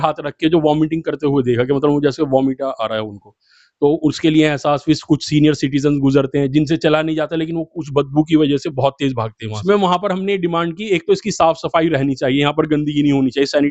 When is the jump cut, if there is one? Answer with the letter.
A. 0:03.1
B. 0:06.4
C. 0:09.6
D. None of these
C